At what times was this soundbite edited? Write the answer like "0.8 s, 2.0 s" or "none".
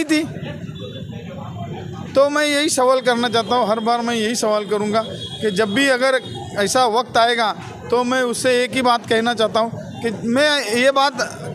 none